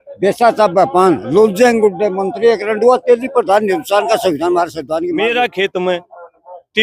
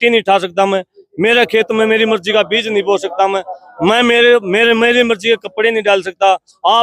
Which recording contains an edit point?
first; 1 cut; at 5.1 s

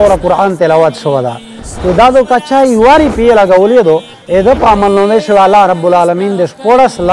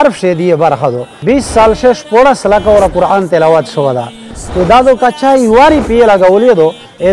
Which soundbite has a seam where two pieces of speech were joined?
second; 1 cut; at 1.1 s

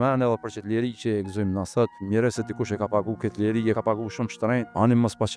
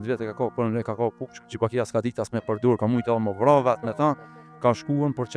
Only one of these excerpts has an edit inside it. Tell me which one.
first; 2 cuts; at 2.0 s, 4.2 s

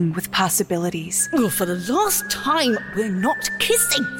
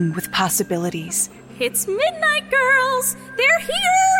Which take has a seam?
first; 1 cut; at 1.2 s

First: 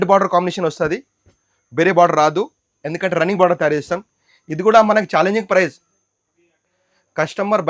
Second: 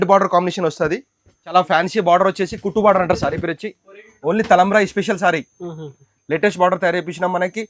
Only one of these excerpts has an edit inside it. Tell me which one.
second; 1 cut; at 1.5 s

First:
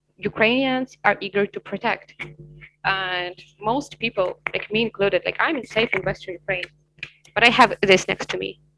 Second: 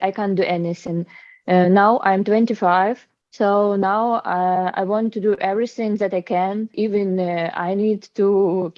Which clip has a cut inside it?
second; 1 cut; at 6.7 s

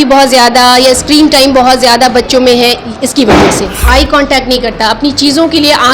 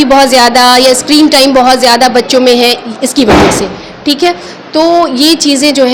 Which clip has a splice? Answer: first; 1 cut; at 3.8 s

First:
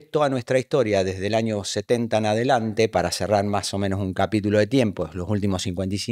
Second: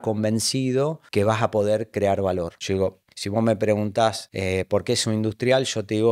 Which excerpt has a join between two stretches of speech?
second; 3 cuts; at 1.0 s, 2.6 s, 4.3 s

